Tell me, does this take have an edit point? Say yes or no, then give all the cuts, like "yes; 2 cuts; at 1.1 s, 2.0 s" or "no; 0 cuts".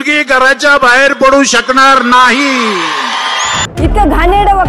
yes; 1 cut; at 3.6 s